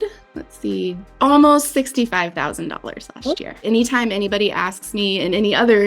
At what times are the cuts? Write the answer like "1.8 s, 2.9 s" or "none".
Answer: 1.0 s, 3.6 s